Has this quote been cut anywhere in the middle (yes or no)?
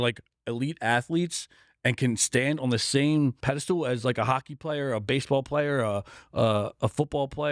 yes